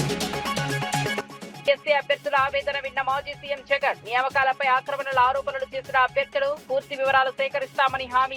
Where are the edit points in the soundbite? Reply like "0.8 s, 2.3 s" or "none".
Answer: 1.4 s